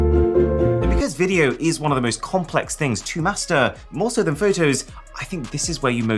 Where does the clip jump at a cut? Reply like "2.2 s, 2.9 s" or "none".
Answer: 1.0 s